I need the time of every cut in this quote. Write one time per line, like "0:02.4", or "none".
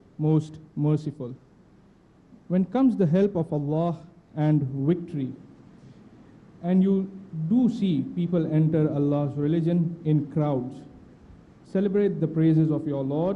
0:02.4